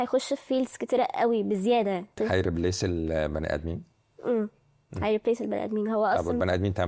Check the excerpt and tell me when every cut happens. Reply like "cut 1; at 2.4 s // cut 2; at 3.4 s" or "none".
none